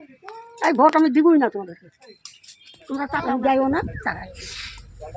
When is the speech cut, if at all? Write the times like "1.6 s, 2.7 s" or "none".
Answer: 3.1 s